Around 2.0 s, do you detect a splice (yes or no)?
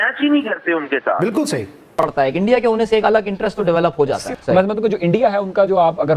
yes